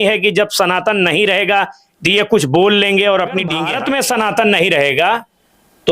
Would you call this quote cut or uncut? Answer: cut